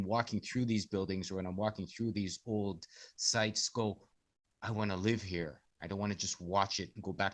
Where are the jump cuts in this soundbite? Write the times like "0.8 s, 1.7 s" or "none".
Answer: none